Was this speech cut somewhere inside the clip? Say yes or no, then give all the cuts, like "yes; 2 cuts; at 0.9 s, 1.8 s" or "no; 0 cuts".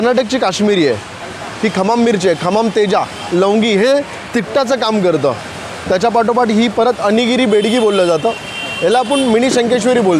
no; 0 cuts